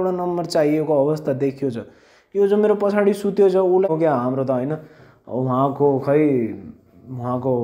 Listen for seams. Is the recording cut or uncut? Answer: cut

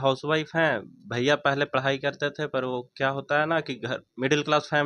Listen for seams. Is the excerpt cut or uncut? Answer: uncut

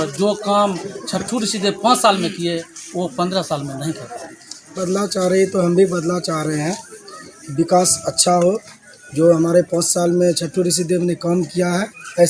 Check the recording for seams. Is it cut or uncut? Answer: cut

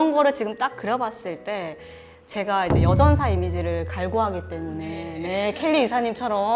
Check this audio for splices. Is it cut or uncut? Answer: uncut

